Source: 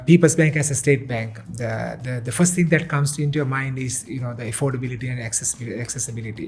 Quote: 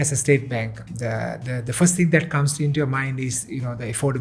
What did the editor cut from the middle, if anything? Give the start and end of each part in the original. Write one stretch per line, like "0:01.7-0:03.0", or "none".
none